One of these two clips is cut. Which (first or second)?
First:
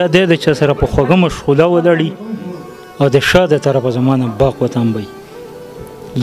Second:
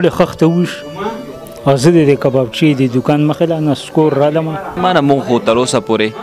second